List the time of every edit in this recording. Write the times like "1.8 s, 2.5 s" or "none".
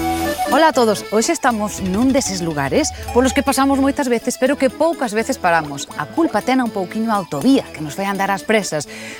none